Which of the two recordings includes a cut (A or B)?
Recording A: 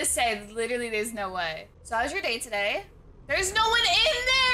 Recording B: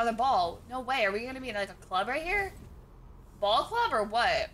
A